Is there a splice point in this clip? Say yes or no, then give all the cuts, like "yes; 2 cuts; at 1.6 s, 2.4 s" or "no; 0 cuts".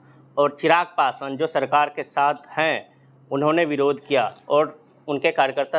no; 0 cuts